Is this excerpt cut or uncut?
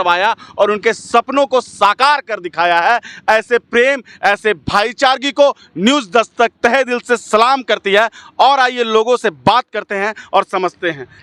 uncut